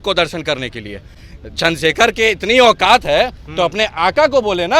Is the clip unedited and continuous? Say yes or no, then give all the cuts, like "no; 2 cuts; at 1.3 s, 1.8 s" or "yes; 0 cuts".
yes; 0 cuts